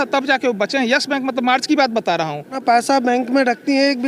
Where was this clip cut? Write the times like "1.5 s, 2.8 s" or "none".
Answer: 2.6 s

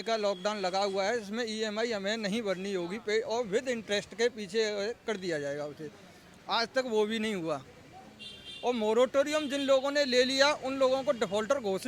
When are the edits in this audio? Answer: none

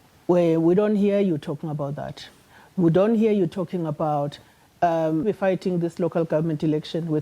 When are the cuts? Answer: 5.2 s

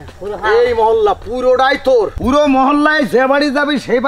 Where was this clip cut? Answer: 2.1 s

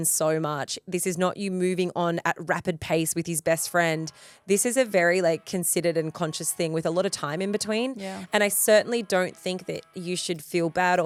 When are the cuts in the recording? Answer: none

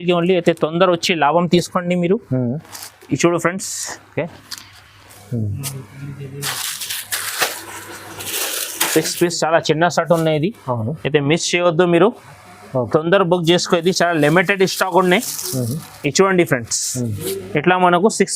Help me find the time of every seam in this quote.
5.1 s

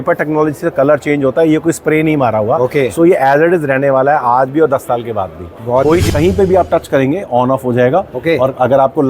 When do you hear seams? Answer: 6.0 s

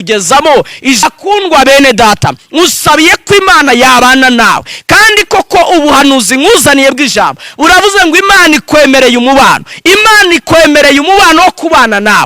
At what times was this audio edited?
1.0 s

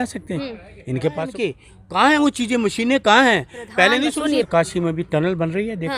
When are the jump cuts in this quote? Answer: 1.3 s, 4.5 s

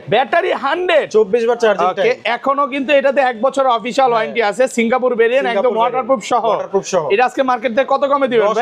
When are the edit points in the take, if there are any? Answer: none

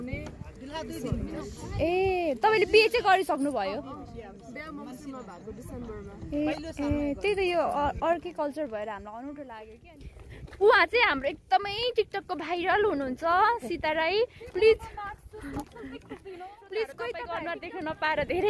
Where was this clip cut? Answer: 9.6 s, 17.6 s

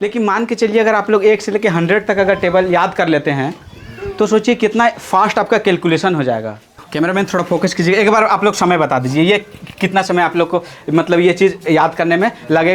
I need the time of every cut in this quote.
6.8 s

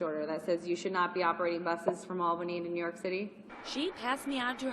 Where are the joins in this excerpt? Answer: none

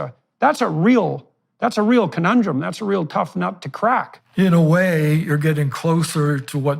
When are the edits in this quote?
4.2 s

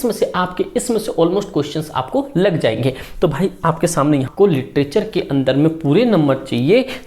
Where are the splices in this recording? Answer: 4.3 s

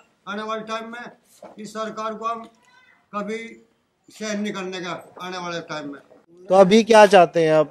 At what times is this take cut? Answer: none

